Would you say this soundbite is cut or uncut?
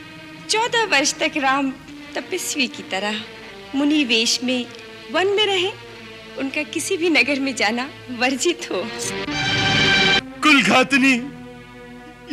cut